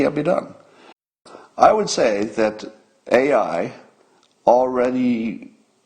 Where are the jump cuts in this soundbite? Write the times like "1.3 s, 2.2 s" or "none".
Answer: 1.1 s